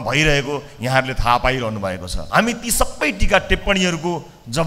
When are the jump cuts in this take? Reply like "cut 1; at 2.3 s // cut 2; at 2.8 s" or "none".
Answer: cut 1; at 2.1 s